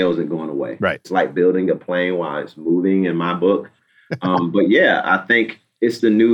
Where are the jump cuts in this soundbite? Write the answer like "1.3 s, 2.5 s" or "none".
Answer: 1.0 s